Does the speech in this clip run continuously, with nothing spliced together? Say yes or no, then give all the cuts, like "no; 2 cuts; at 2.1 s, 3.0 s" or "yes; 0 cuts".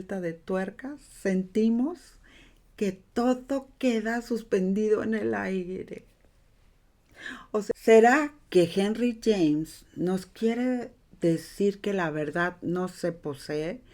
no; 1 cut; at 7.7 s